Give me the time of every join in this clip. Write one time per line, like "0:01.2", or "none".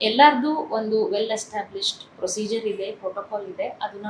none